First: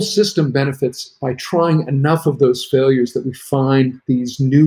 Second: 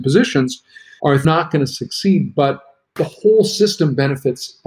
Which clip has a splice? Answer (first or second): second